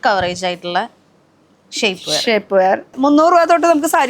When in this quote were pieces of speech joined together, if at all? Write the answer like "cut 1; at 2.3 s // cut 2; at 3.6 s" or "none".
cut 1; at 2.9 s